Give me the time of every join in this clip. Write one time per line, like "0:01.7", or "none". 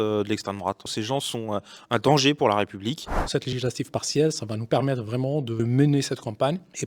0:00.9
0:03.2